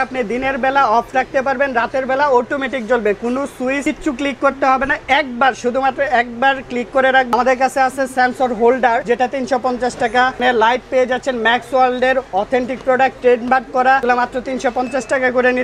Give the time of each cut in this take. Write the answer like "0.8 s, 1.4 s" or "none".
3.8 s, 7.3 s, 9.0 s, 10.4 s, 14.0 s